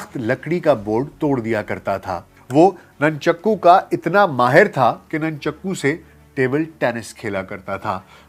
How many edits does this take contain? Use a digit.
1